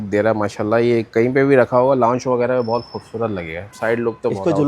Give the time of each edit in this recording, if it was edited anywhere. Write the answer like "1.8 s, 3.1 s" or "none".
3.6 s